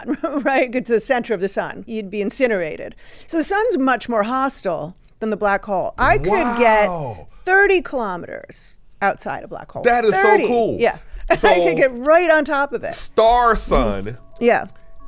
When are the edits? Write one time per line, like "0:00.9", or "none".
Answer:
0:01.8